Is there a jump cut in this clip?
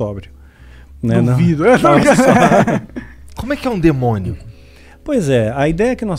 no; 0 cuts

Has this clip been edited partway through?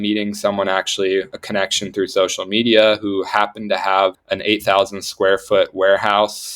yes; 1 cut; at 4.2 s

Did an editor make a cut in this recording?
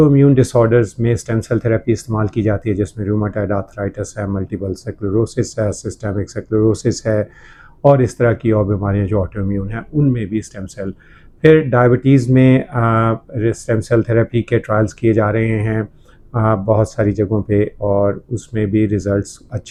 no; 0 cuts

